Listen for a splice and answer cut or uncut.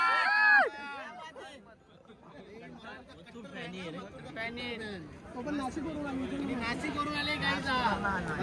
uncut